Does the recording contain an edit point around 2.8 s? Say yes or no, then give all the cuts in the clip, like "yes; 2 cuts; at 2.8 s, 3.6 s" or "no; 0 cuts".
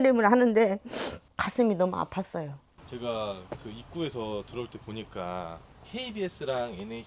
yes; 1 cut; at 2.8 s